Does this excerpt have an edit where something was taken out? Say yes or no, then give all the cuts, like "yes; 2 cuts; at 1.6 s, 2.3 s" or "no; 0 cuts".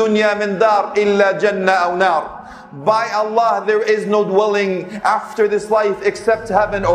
no; 0 cuts